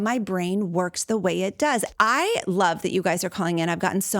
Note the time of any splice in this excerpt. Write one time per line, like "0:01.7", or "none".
0:01.9